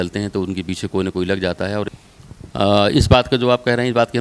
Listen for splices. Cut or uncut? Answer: cut